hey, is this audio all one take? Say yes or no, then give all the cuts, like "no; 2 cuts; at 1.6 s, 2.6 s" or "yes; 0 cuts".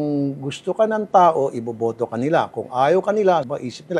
yes; 0 cuts